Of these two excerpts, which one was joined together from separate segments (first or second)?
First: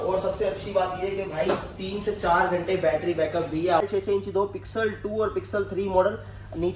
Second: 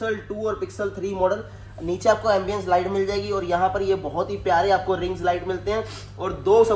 first